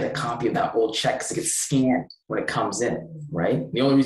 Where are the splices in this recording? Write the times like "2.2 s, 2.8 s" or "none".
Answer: 2.2 s